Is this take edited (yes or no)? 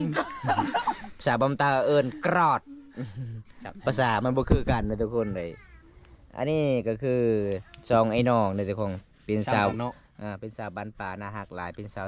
no